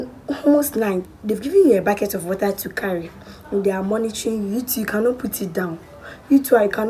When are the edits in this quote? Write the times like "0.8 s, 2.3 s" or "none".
1.1 s